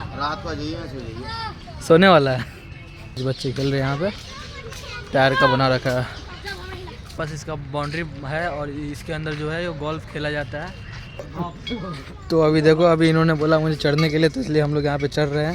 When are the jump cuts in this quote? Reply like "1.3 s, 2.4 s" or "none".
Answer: 3.2 s, 7.1 s, 11.2 s